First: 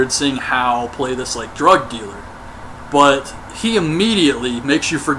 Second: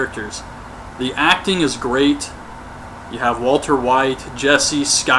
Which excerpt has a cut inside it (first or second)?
first